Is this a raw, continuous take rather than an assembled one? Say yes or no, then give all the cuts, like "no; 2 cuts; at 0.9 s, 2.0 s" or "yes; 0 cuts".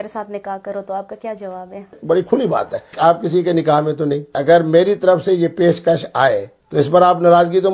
no; 4 cuts; at 2.0 s, 2.9 s, 4.3 s, 6.6 s